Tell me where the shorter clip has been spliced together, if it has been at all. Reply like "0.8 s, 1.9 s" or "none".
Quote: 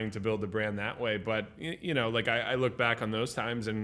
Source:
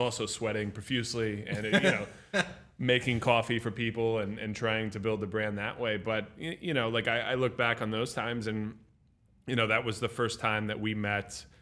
none